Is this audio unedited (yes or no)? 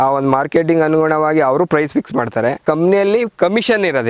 no